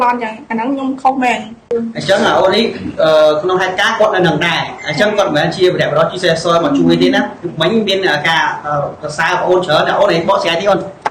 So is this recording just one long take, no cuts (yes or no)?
no